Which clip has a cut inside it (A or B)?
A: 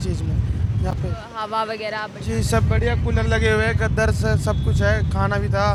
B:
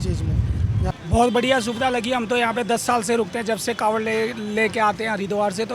B